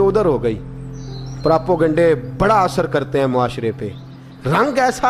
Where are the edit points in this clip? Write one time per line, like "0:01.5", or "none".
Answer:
none